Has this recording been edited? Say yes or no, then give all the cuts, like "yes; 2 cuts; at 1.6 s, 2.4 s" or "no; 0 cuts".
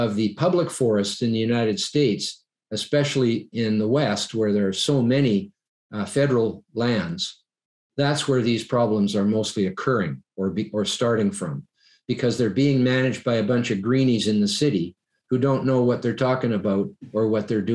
no; 0 cuts